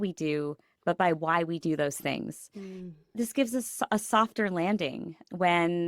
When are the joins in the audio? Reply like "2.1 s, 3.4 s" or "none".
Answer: 3.1 s

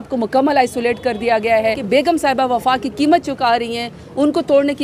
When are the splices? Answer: 1.8 s

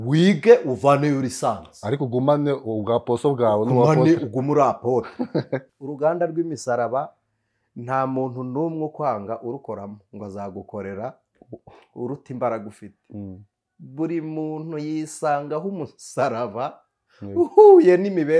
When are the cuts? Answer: 5.7 s

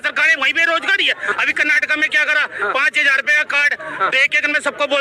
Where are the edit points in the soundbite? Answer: 1.3 s

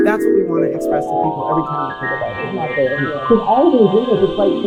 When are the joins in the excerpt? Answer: none

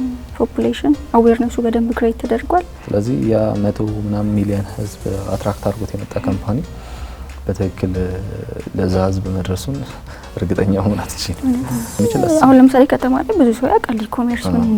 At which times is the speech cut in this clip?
2.8 s, 12.0 s

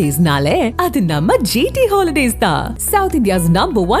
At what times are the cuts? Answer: none

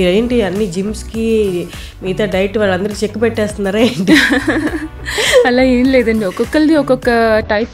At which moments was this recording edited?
none

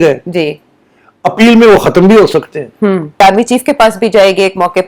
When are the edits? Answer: 3.2 s

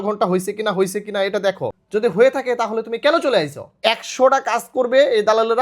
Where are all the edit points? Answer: 1.7 s, 3.7 s

